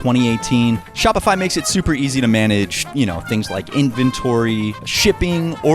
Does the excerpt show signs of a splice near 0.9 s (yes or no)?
yes